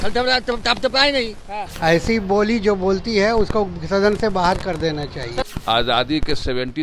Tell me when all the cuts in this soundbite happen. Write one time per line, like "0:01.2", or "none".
0:01.7
0:05.4